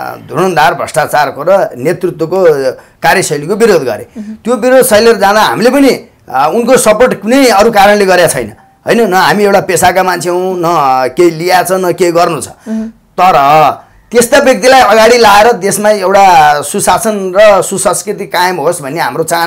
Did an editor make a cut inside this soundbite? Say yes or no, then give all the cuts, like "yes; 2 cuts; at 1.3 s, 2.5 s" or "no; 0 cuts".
no; 0 cuts